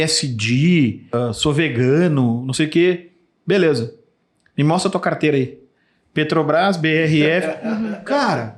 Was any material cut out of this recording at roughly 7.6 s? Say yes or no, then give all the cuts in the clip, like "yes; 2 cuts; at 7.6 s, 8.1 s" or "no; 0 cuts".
no; 1 cut; at 1.2 s